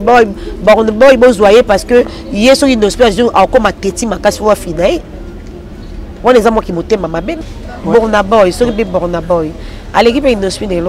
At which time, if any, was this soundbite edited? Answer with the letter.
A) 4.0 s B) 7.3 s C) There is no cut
B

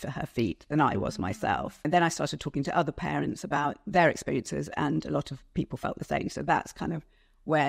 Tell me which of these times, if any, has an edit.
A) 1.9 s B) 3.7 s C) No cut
A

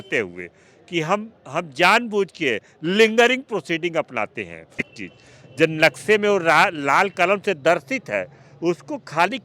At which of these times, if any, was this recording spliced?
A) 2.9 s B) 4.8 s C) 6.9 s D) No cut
B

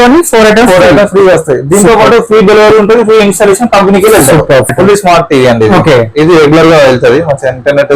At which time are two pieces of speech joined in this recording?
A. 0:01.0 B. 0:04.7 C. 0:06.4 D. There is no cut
B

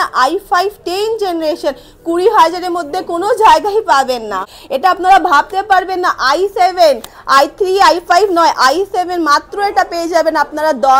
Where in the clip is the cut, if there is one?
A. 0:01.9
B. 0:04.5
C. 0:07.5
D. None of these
B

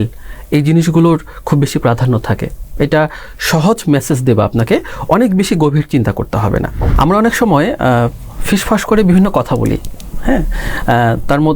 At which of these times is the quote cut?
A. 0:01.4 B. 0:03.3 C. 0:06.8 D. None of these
C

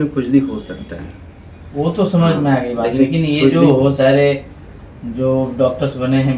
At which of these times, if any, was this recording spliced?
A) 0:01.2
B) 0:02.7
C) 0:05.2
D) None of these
D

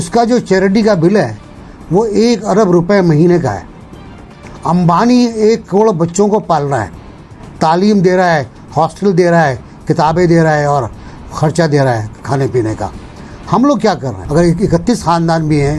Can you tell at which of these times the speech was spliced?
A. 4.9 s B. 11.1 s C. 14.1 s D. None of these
C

